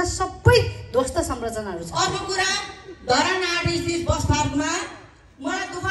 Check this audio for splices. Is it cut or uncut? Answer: cut